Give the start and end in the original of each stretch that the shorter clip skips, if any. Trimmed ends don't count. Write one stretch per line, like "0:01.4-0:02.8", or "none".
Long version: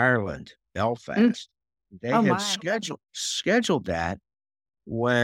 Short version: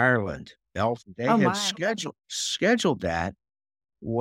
0:01.0-0:01.9